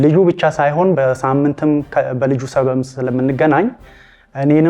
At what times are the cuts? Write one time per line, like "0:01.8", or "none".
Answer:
0:01.0